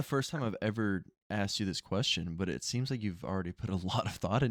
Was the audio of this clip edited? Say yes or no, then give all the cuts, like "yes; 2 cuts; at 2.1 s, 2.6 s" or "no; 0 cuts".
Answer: no; 0 cuts